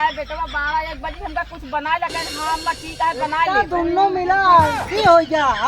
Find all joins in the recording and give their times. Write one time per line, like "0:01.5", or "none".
0:03.5